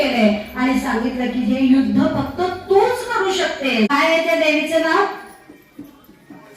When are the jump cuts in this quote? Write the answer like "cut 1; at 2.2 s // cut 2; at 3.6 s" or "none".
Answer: cut 1; at 3.9 s